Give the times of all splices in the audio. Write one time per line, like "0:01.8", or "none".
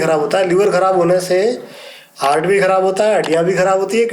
none